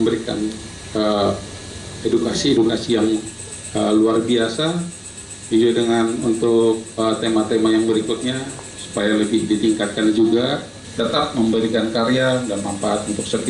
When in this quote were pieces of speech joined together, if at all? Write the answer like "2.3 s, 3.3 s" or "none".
10.8 s